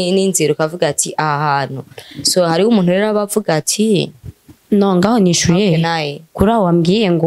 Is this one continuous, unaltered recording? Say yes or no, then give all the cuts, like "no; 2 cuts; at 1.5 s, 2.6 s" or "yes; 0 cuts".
yes; 0 cuts